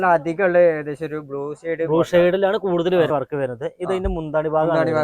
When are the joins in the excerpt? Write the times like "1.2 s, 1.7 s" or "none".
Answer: 3.1 s